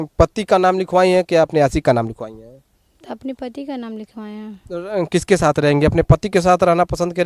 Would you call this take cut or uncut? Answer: uncut